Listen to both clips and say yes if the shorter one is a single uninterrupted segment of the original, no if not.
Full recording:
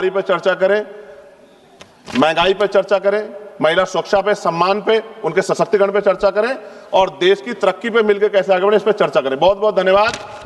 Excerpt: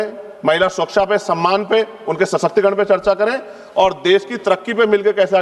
yes